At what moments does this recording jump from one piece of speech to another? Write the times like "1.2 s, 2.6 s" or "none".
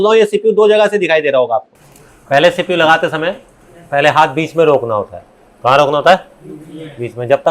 1.7 s